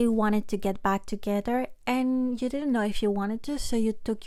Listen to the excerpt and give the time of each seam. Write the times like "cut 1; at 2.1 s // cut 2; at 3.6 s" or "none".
none